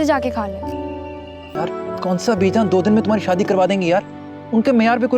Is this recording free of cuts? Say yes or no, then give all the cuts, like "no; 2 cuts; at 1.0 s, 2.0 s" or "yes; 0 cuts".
no; 1 cut; at 1.5 s